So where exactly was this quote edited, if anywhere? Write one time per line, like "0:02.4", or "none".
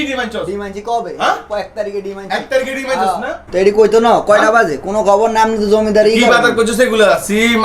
0:03.5